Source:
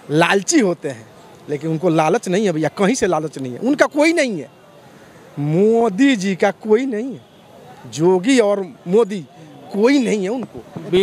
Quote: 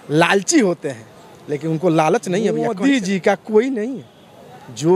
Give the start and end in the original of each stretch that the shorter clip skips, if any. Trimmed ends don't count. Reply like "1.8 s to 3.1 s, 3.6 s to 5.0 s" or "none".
2.6 s to 5.7 s